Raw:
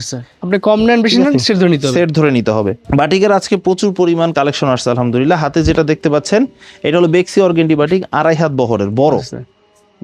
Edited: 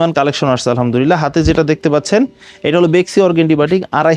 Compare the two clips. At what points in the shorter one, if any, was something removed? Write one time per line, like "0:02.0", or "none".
none